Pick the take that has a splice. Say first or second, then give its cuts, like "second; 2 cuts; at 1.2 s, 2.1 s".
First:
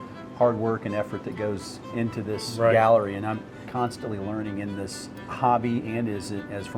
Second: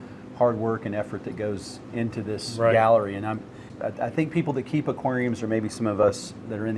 first; 2 cuts; at 3.6 s, 5.3 s